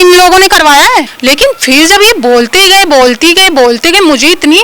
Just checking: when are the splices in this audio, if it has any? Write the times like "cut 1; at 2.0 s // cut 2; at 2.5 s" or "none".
cut 1; at 1.1 s